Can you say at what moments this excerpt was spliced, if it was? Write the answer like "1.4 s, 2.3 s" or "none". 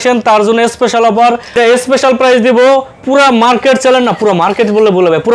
1.5 s